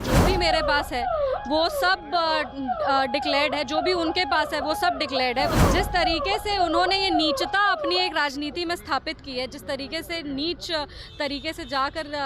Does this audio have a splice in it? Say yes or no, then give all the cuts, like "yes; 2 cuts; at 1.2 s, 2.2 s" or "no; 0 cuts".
yes; 1 cut; at 5.6 s